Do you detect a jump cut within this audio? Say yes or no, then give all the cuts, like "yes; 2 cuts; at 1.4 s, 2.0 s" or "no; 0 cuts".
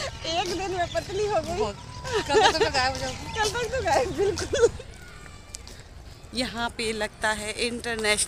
yes; 1 cut; at 4.7 s